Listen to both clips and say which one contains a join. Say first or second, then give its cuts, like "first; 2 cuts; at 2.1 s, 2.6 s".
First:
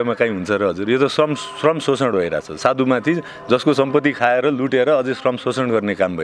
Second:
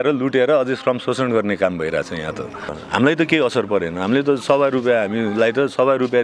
second; 1 cut; at 2.8 s